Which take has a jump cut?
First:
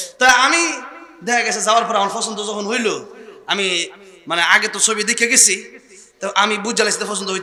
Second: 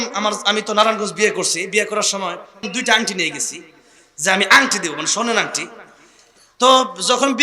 second; 1 cut; at 2.7 s

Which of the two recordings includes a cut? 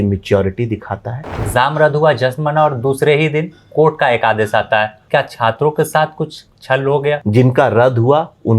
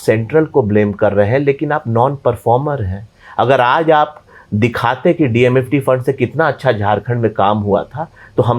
first; 3 cuts; at 1.4 s, 5.0 s, 7.2 s

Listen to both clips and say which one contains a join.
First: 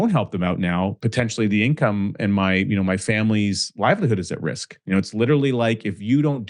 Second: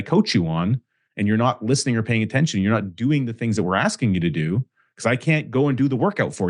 first; 2 cuts; at 1.0 s, 4.8 s

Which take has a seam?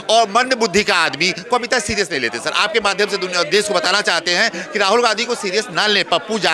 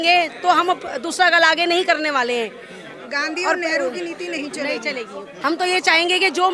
second; 1 cut; at 5.3 s

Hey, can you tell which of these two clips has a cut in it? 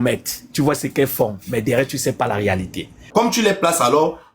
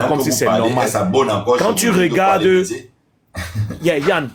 first; 1 cut; at 3.0 s

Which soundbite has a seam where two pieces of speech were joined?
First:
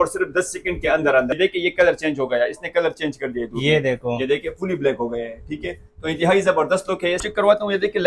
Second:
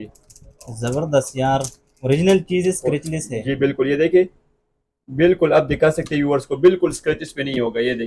first; 2 cuts; at 1.3 s, 7.2 s

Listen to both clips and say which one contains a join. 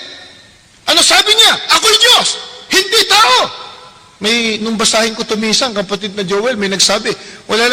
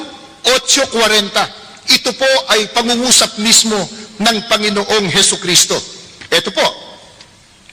second; 1 cut; at 3.6 s

